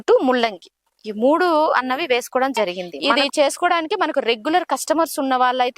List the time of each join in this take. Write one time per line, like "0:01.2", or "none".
0:02.9

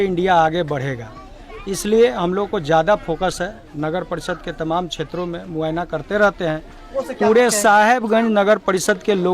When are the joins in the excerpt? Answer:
0:06.9

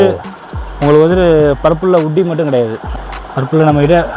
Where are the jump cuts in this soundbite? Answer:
0:02.8

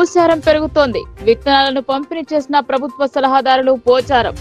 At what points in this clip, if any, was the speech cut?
none

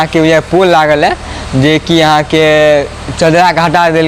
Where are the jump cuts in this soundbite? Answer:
none

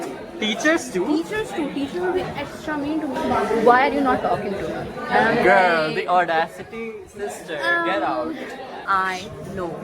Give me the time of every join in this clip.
0:03.2
0:08.7

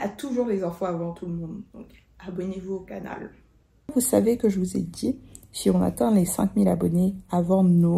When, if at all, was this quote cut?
0:03.9

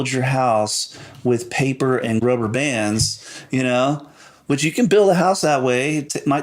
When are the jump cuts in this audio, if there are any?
0:02.2

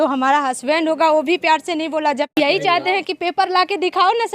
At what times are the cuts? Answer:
0:02.4

